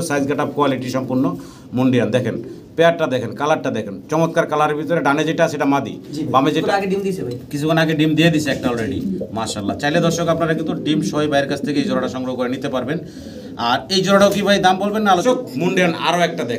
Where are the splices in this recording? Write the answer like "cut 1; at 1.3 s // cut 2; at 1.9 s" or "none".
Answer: cut 1; at 6.6 s // cut 2; at 15.2 s